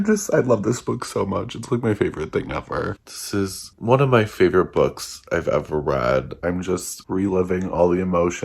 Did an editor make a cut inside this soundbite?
yes; 2 cuts; at 3.0 s, 6.3 s

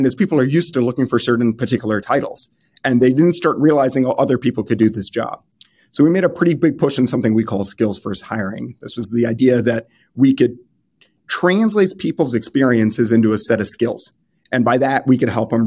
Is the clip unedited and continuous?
yes; 0 cuts

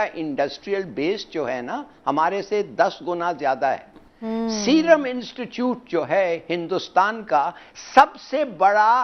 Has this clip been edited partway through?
yes; 1 cut; at 4.2 s

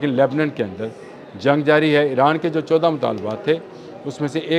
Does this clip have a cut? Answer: no; 0 cuts

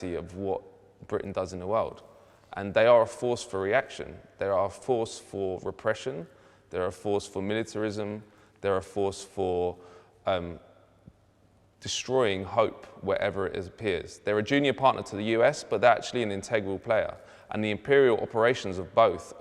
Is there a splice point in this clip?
no; 0 cuts

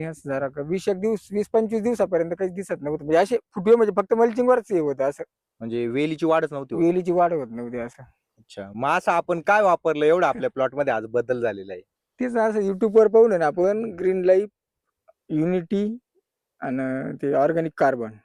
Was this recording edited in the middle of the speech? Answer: no; 0 cuts

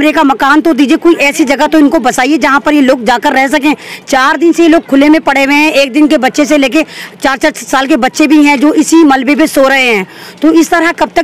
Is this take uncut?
yes; 0 cuts

